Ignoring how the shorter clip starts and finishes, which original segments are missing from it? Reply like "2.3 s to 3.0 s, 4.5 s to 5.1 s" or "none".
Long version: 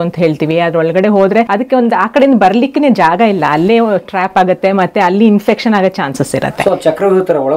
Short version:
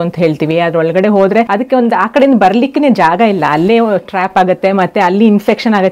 none